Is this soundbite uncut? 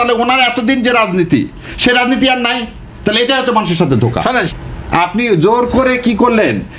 no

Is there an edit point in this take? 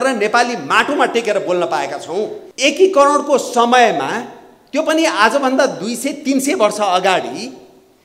yes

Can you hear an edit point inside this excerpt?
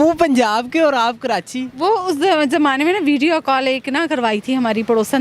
no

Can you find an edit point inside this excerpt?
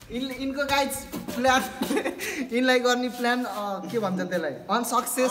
no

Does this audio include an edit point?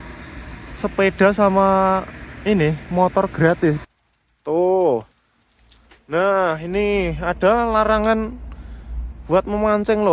yes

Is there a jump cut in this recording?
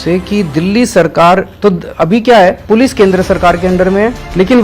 yes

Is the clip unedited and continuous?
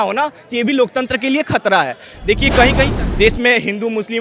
no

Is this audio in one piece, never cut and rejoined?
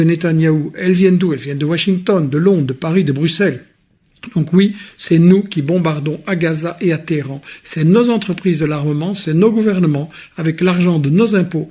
yes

